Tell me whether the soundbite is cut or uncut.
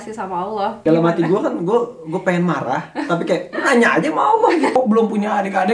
cut